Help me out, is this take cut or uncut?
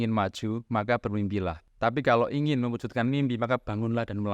cut